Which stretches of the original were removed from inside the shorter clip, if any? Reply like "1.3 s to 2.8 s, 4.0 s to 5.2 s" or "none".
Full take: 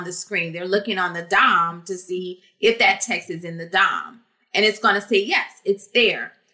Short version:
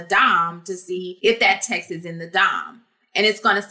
2.3 s to 2.5 s